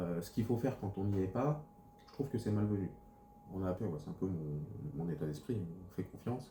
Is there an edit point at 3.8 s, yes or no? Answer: yes